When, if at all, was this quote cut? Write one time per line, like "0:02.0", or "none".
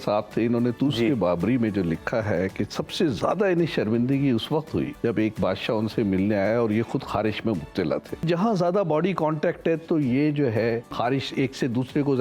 0:04.9
0:08.2
0:10.9